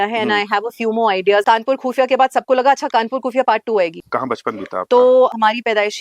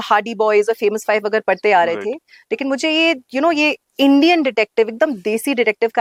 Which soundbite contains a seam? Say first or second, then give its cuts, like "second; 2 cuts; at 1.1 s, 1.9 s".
first; 3 cuts; at 1.4 s, 4.0 s, 5.3 s